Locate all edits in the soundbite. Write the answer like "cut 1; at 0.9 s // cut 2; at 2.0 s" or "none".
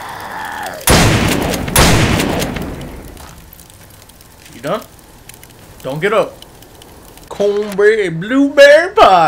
cut 1; at 7.2 s